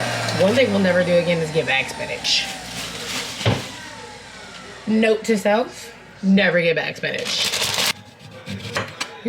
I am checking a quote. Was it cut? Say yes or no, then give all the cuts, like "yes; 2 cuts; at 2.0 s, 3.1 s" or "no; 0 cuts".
yes; 1 cut; at 7.9 s